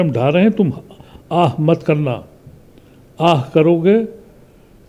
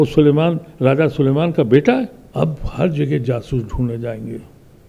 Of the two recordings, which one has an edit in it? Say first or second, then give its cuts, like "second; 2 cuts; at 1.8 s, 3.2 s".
second; 1 cut; at 2.2 s